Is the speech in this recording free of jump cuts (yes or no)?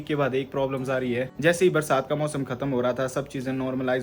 no